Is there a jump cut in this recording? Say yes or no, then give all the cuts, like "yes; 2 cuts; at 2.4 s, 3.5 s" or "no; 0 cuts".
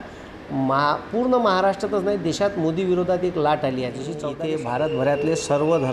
yes; 1 cut; at 4.2 s